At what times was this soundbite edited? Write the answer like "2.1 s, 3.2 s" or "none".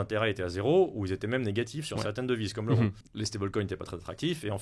3.1 s